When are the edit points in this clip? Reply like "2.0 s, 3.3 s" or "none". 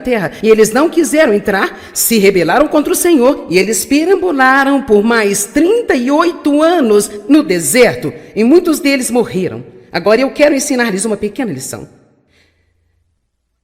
10.4 s